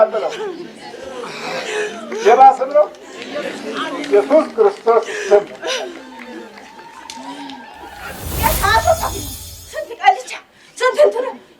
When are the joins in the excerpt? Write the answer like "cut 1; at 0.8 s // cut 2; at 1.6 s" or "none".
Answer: cut 1; at 8.2 s